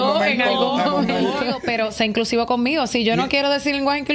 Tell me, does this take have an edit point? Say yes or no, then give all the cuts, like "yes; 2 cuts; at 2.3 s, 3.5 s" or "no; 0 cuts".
yes; 1 cut; at 1.6 s